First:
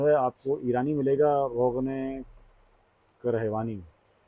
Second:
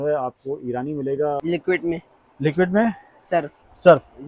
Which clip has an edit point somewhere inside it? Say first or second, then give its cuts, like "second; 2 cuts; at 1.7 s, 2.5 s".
second; 1 cut; at 1.4 s